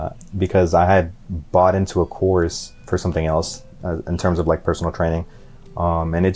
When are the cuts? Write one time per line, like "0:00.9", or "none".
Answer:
0:02.7
0:03.7